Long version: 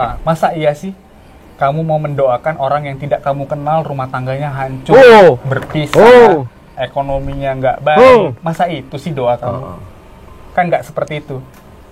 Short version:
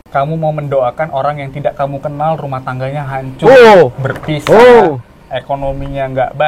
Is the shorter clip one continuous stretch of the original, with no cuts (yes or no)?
yes